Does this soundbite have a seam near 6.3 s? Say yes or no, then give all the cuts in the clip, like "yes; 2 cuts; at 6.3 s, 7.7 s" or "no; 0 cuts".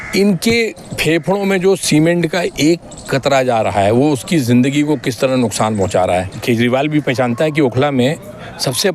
yes; 1 cut; at 6.3 s